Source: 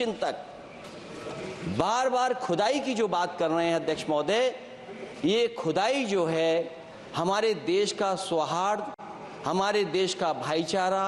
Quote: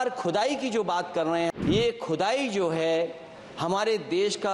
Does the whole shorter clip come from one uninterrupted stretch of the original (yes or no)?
no